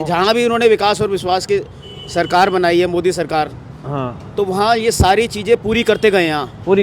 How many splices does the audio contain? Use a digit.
0